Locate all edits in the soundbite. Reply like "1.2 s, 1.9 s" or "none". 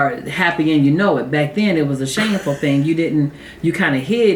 none